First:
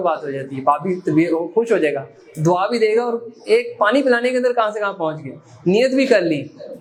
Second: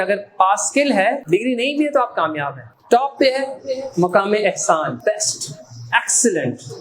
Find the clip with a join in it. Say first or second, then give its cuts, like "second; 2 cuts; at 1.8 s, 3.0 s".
second; 3 cuts; at 1.2 s, 2.7 s, 5.0 s